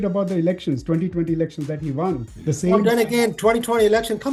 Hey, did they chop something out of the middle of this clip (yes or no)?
no